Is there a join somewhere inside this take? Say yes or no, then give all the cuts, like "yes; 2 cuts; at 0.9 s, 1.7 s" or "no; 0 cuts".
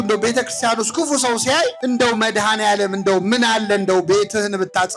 yes; 1 cut; at 1.8 s